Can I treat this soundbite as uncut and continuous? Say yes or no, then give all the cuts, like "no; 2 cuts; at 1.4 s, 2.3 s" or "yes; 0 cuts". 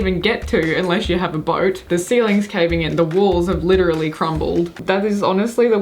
no; 2 cuts; at 1.8 s, 4.8 s